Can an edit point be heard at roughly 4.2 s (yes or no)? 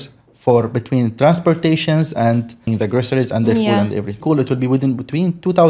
yes